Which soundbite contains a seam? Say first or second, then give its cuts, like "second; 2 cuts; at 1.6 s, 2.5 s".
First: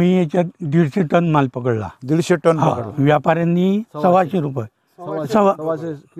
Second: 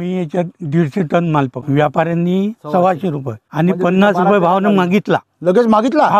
second; 2 cuts; at 1.6 s, 3.5 s